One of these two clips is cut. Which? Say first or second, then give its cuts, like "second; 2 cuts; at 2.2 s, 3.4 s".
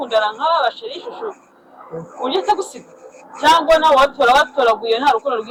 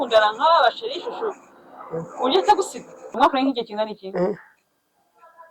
second; 1 cut; at 3.2 s